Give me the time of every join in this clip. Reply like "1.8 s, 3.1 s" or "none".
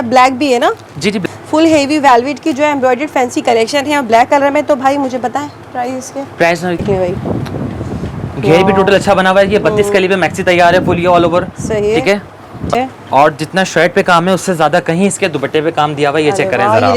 1.2 s, 6.8 s, 12.7 s